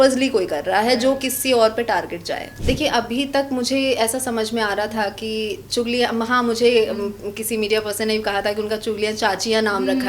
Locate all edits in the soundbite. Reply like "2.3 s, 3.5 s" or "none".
2.6 s